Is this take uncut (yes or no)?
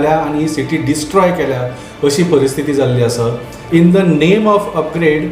no